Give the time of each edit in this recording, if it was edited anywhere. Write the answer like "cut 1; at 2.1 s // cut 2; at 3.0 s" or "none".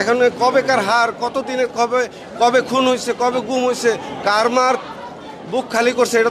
none